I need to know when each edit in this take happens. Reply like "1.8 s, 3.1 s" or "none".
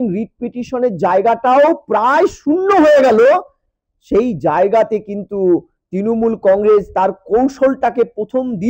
none